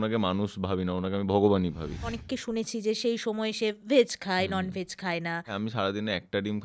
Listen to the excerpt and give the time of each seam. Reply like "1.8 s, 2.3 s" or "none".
2.2 s, 5.5 s

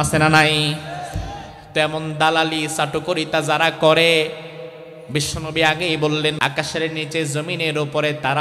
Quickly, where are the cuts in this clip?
6.4 s

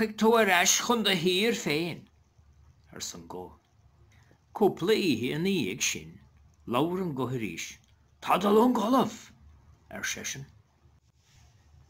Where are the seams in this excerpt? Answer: 11.0 s

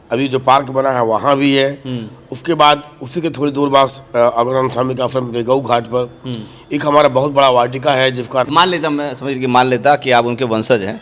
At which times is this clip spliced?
8.5 s

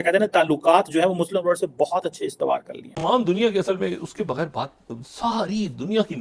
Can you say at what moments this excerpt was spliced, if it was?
2.9 s

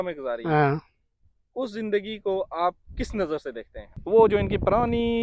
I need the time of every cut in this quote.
4.0 s

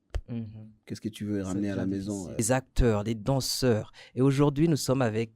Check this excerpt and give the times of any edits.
2.4 s

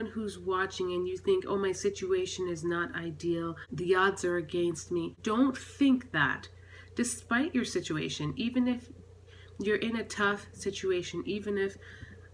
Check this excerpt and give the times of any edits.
3.6 s, 5.1 s

